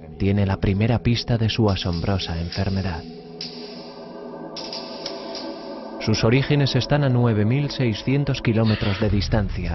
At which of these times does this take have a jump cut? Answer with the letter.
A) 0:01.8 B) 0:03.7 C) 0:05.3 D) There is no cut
D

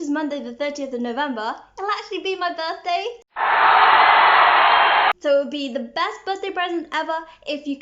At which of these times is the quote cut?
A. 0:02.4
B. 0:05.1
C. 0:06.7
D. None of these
B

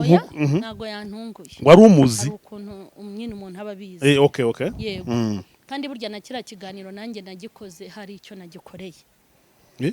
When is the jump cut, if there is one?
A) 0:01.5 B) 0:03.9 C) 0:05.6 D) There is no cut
D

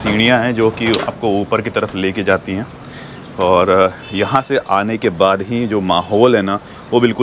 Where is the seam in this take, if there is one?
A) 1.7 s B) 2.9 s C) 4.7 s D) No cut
D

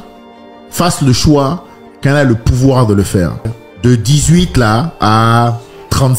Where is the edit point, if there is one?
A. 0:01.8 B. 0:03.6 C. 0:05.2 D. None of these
B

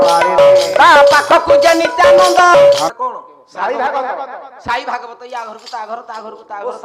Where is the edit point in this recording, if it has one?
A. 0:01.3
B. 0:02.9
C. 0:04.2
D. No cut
B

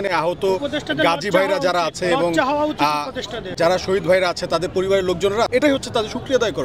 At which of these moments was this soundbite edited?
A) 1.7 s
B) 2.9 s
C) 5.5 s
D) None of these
C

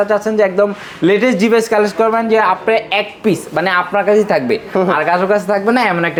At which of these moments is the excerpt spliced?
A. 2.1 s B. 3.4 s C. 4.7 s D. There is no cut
D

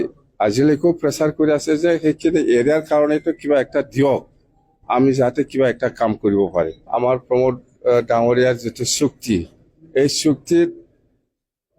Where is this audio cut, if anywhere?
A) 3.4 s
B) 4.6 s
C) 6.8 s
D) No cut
C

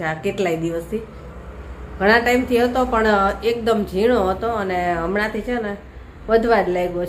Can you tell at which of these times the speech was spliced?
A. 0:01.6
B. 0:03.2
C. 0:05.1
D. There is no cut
D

